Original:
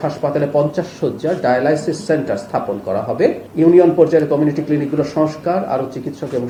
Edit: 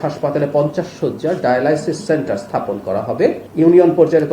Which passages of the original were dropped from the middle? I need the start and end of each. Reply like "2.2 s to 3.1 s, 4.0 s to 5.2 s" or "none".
none